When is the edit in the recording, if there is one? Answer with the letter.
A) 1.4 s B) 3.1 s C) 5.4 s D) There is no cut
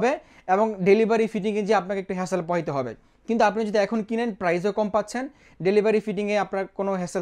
D